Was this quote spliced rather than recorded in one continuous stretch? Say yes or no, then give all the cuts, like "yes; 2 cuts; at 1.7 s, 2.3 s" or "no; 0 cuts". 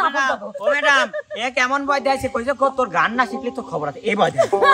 no; 0 cuts